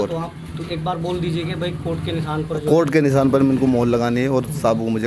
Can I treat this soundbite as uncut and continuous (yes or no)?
yes